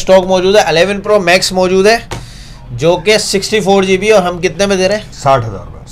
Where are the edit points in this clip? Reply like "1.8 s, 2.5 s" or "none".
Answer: 1.0 s